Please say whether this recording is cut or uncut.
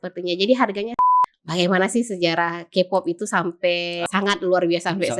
cut